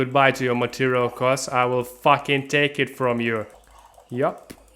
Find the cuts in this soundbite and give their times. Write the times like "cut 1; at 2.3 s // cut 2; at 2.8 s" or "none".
cut 1; at 3.5 s